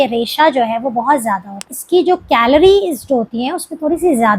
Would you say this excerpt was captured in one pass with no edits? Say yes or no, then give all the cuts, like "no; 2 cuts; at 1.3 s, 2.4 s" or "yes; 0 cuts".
no; 1 cut; at 1.6 s